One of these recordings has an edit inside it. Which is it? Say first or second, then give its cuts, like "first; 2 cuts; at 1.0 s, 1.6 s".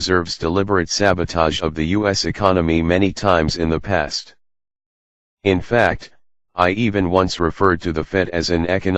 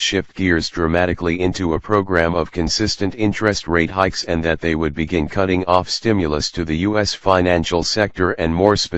second; 1 cut; at 6.6 s